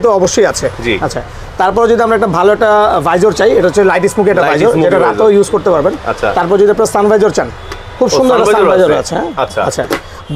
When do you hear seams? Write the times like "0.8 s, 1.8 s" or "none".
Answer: none